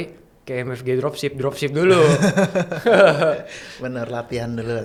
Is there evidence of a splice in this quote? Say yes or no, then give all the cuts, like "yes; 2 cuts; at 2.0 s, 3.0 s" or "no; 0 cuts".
no; 0 cuts